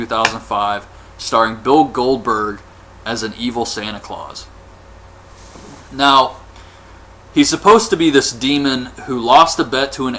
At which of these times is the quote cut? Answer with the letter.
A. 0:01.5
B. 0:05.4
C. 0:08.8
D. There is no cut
B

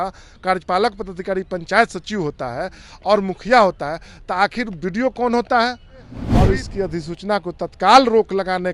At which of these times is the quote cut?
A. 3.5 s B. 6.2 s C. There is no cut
B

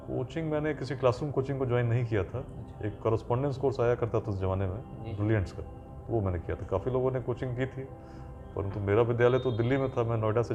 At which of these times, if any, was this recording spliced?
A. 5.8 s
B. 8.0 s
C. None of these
C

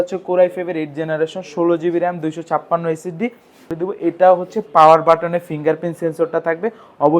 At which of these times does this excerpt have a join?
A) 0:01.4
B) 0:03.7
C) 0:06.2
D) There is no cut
B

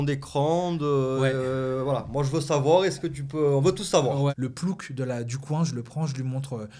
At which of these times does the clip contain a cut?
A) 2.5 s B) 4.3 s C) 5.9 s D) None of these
B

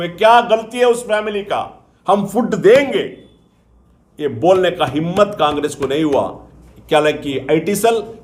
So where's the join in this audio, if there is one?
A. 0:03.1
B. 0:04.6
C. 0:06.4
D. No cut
D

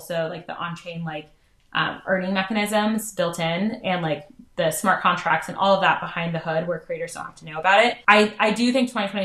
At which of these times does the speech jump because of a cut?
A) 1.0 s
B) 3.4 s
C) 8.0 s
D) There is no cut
C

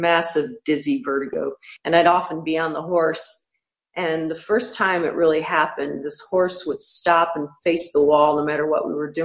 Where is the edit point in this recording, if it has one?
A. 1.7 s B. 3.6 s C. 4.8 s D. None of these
A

